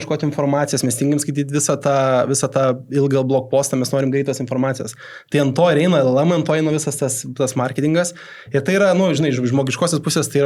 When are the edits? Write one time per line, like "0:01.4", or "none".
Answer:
none